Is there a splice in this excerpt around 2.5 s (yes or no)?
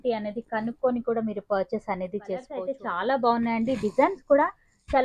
yes